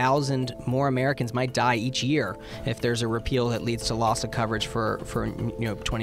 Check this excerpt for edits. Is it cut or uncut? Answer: uncut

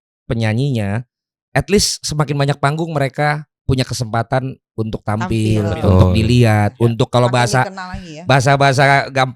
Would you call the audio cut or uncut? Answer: uncut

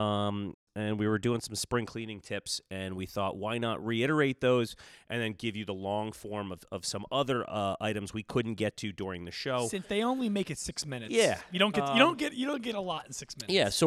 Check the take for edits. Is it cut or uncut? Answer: uncut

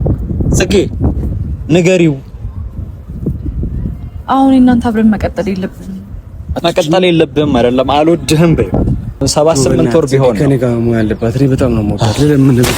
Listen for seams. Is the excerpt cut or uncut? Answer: cut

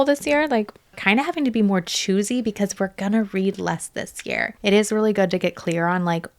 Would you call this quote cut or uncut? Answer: cut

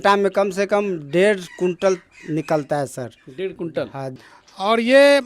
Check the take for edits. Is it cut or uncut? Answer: cut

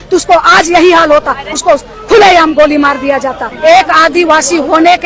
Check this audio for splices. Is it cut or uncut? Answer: cut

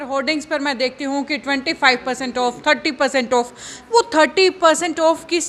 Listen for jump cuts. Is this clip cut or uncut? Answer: uncut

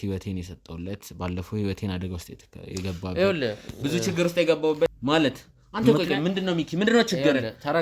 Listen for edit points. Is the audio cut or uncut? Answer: cut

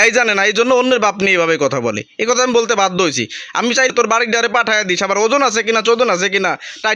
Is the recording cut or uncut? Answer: cut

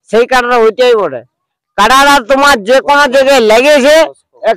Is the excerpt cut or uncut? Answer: uncut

